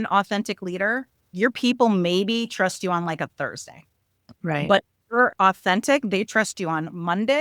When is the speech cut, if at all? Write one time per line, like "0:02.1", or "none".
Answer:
0:01.3